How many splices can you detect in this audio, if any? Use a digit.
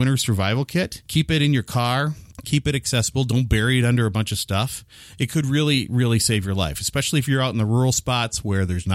2